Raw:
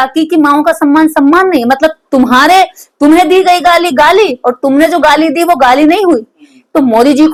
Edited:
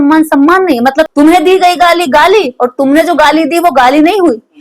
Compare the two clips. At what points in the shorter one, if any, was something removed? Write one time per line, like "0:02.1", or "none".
0:01.1